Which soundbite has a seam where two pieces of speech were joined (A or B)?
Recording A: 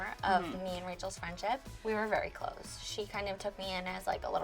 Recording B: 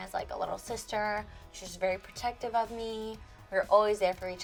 A